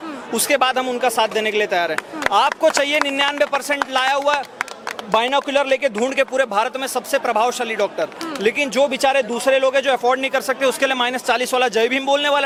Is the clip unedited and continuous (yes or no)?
yes